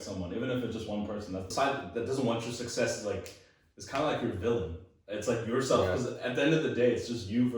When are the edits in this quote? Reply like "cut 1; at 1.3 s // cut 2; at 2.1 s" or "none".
cut 1; at 1.4 s